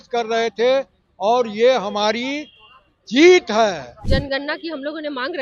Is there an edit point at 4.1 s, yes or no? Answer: yes